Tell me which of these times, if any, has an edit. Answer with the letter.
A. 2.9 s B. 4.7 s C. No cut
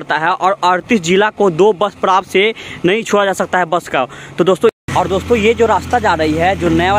B